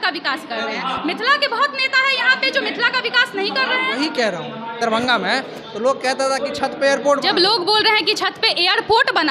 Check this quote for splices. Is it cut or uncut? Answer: cut